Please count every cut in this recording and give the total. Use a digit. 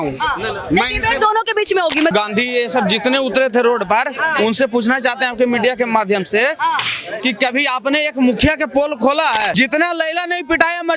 2